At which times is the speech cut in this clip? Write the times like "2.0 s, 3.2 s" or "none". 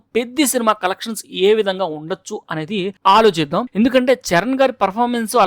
3.7 s

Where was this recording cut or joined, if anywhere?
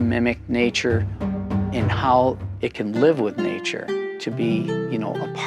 4.0 s

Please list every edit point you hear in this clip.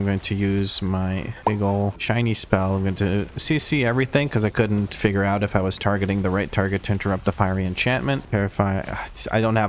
8.2 s

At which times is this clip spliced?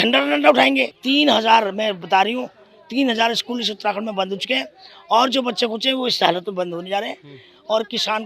0.9 s

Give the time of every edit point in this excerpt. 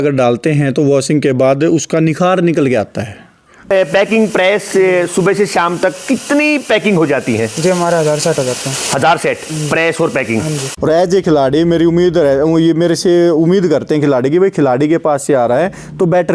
3.6 s, 10.7 s

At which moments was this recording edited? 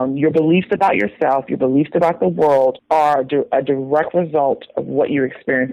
2.8 s

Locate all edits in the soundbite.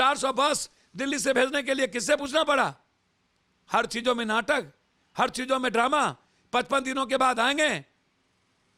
none

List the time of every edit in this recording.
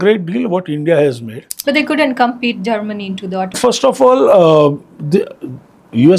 1.5 s, 3.5 s

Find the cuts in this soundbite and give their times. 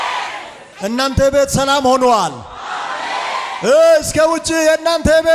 none

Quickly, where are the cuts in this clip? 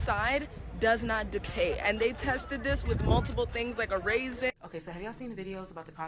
4.5 s

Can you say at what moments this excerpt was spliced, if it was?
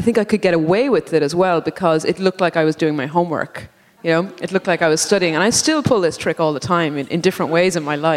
none

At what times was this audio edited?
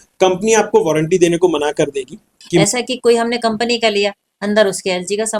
2.6 s

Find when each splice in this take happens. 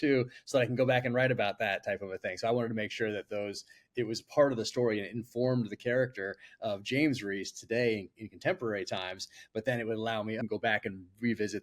10.4 s

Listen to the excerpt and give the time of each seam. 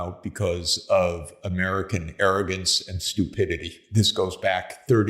3.8 s

